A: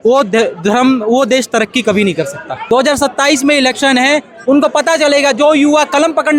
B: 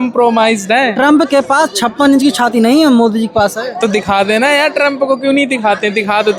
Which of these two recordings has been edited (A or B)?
A